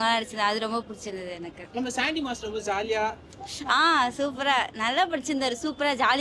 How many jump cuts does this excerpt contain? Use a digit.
0